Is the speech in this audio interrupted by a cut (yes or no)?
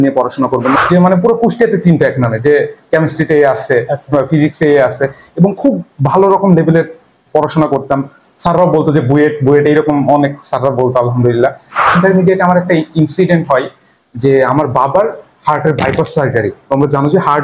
yes